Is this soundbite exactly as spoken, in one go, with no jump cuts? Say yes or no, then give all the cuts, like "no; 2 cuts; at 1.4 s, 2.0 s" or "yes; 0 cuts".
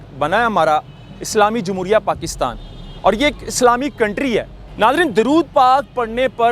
no; 1 cut; at 4.6 s